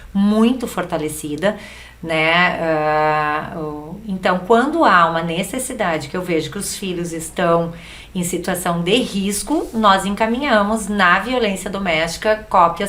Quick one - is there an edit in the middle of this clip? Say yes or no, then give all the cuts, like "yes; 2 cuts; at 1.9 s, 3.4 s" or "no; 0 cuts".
no; 0 cuts